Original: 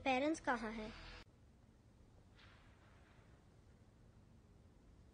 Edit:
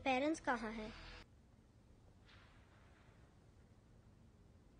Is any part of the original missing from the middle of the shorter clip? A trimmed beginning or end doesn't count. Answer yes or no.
yes